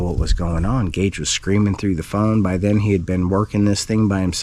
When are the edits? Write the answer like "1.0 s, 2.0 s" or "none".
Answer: none